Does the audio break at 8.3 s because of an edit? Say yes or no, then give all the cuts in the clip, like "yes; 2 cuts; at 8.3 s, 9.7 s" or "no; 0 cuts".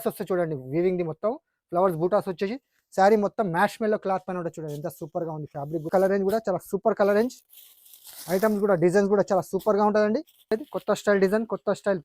no; 2 cuts; at 5.9 s, 10.5 s